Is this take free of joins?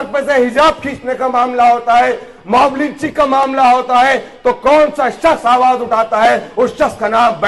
yes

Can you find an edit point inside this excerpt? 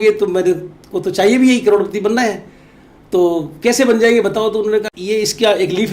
yes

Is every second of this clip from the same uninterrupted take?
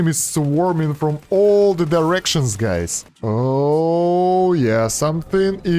no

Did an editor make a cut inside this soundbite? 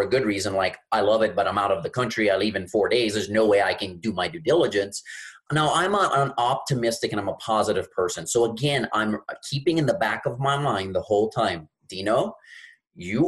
yes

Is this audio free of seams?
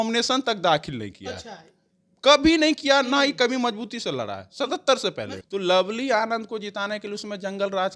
no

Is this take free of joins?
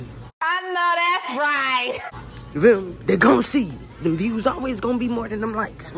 yes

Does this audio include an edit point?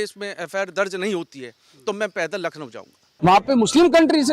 yes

